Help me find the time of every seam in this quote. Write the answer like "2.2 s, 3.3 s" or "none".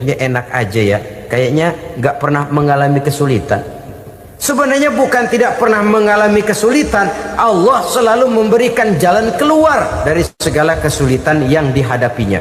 10.4 s

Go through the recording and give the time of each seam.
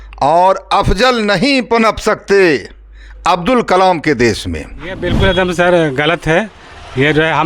5.1 s

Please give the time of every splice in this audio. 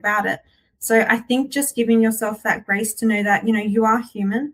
none

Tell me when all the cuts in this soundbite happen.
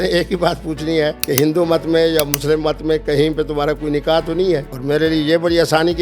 1.2 s, 4.7 s

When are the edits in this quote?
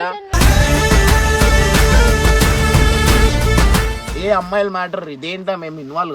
4.0 s

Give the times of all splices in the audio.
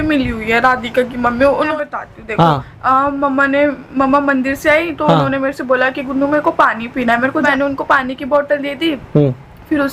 1.7 s, 7.4 s

